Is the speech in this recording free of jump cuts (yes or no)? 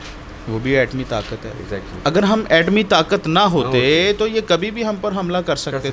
yes